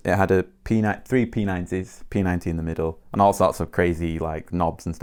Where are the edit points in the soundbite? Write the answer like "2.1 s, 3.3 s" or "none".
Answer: none